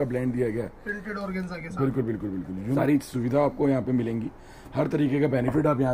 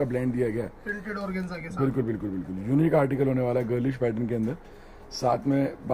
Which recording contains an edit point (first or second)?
first